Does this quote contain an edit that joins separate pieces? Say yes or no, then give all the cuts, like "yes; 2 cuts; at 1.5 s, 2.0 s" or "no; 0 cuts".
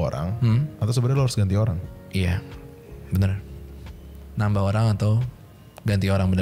no; 0 cuts